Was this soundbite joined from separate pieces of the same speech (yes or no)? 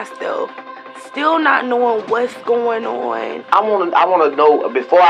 yes